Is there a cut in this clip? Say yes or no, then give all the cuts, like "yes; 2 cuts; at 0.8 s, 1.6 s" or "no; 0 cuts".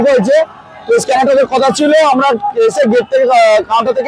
no; 0 cuts